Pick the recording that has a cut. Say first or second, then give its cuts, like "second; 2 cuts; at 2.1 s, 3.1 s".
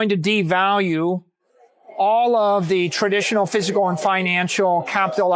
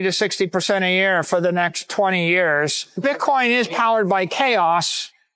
second; 1 cut; at 3.0 s